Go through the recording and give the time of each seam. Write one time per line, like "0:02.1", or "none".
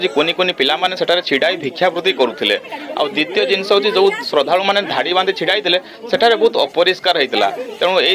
none

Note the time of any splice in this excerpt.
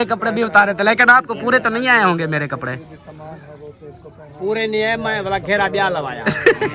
none

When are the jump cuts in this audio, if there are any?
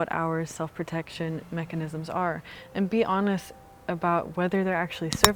none

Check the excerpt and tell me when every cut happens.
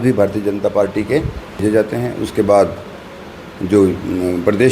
0:01.6

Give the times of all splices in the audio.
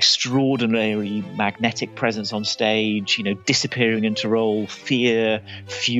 none

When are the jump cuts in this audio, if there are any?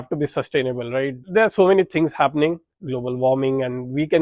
0:01.2
0:02.7

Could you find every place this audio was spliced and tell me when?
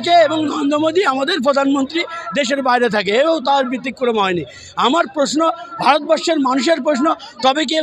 none

